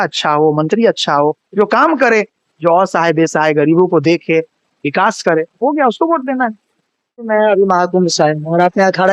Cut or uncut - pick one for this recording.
cut